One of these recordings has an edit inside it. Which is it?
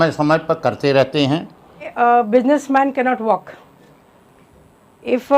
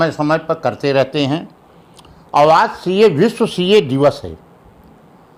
first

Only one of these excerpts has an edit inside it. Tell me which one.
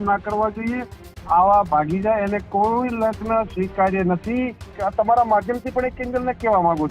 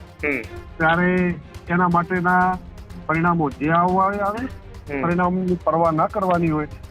first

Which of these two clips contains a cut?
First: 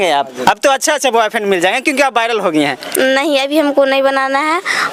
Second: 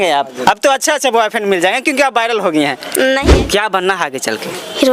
second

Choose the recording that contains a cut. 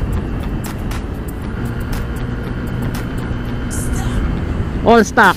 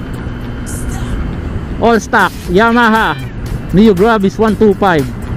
first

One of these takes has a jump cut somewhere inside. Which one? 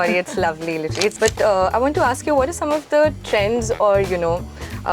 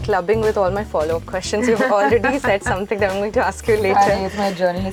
first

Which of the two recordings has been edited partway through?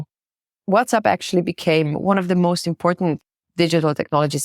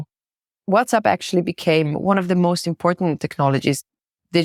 first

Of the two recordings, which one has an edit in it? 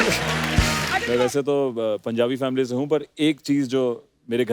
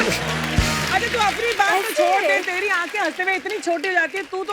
first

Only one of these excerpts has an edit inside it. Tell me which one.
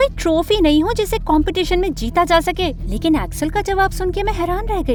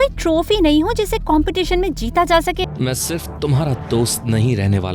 second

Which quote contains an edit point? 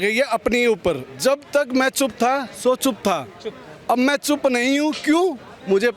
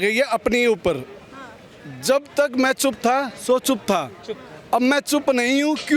first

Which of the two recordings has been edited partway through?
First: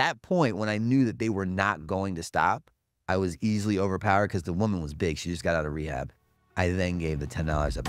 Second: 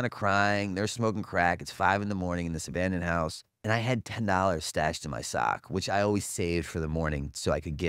second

